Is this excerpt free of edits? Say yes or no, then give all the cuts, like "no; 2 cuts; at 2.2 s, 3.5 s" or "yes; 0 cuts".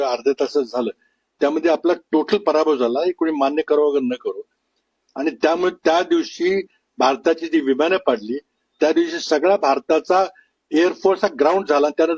yes; 0 cuts